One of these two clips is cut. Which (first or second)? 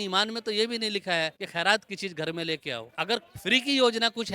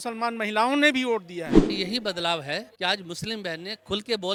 first